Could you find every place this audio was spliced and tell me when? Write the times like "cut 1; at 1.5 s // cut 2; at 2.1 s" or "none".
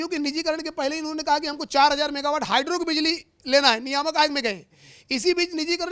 none